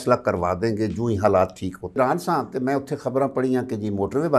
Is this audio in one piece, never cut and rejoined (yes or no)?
no